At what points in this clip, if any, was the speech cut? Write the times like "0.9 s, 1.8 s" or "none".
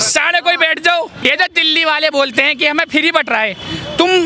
1.2 s